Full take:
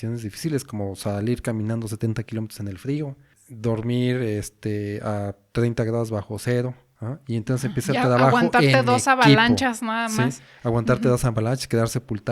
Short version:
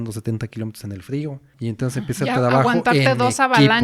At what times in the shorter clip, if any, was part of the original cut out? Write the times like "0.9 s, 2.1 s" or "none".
1.5 s